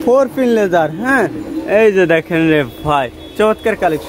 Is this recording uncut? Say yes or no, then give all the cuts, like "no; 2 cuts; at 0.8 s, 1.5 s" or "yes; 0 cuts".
yes; 0 cuts